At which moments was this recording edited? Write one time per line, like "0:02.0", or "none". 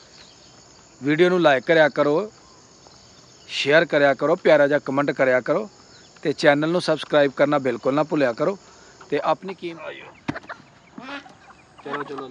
0:09.5

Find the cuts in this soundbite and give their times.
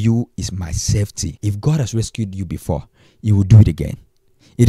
0:01.3

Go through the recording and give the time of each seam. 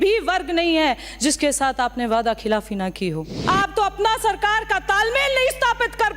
0:03.3

